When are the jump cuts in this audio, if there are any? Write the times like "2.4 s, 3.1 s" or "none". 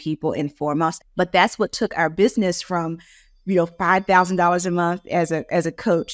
1.0 s